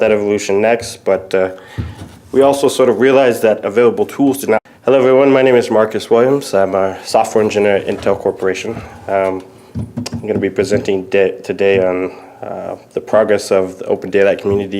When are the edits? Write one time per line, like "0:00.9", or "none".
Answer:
none